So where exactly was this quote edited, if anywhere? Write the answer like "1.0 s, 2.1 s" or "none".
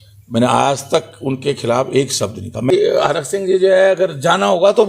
2.7 s